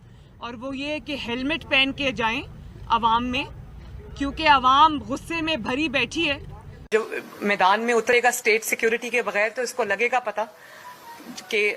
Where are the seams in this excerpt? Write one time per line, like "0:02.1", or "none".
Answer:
none